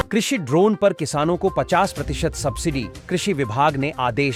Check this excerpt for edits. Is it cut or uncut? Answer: uncut